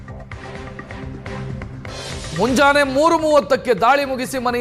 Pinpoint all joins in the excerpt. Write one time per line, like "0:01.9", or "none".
none